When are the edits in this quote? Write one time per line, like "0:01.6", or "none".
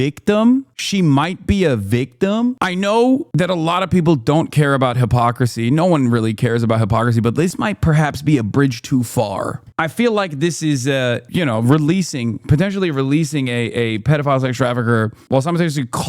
0:02.6
0:03.3